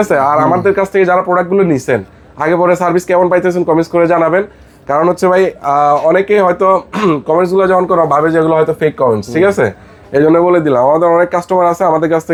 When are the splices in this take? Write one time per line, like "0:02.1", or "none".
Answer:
none